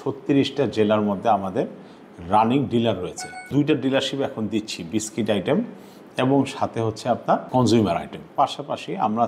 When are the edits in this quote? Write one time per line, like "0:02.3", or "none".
0:03.5
0:07.5
0:08.3